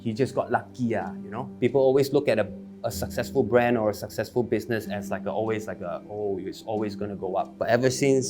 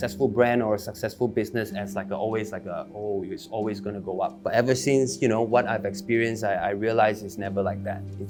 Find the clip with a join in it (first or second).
first